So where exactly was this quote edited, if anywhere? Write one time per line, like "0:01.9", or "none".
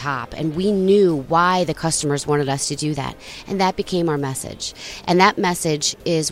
none